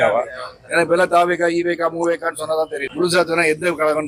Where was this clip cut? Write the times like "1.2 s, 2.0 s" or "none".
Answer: none